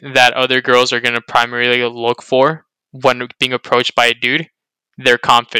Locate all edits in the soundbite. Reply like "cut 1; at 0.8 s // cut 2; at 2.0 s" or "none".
none